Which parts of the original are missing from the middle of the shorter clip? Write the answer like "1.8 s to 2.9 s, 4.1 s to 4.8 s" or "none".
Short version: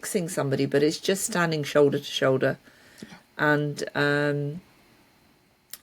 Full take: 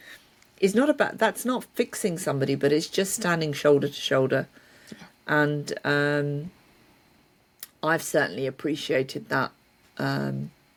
none